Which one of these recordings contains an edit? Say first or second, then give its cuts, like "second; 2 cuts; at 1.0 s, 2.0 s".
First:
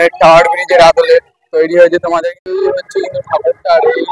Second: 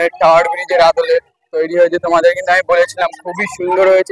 first; 1 cut; at 2.2 s